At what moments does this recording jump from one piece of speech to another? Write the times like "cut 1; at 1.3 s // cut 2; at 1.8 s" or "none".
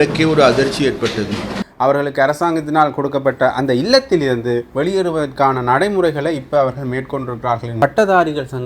cut 1; at 1.6 s // cut 2; at 7.8 s